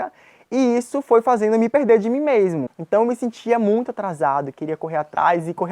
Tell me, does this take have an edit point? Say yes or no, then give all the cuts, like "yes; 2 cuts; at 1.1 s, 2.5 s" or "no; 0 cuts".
yes; 1 cut; at 2.6 s